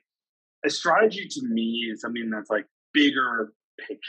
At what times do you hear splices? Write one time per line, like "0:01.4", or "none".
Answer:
0:02.8